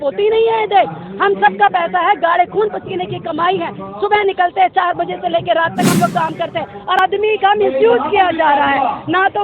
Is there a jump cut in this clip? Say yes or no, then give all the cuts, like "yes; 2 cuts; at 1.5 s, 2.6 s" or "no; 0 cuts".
yes; 1 cut; at 7.0 s